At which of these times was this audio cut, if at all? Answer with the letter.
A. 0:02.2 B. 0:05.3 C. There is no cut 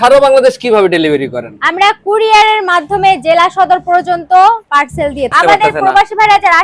B